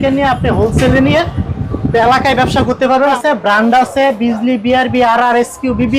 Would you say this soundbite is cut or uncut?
cut